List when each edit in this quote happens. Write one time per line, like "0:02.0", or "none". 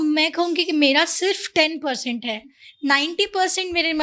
none